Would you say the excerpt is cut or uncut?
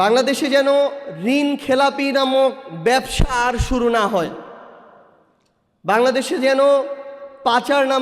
uncut